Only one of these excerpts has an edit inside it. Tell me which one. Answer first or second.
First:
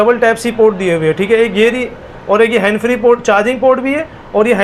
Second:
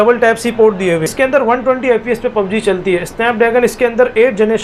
second